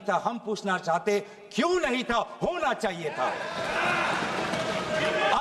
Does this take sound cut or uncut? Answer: uncut